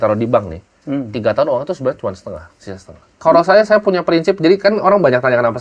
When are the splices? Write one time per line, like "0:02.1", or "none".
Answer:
0:03.1